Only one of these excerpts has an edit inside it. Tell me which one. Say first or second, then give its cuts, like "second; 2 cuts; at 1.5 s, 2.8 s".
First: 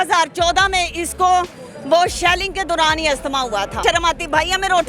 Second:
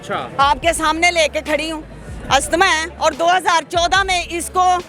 first; 1 cut; at 3.8 s